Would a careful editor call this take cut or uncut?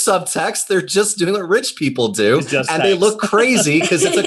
uncut